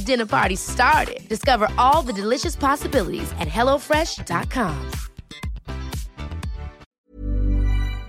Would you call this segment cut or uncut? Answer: cut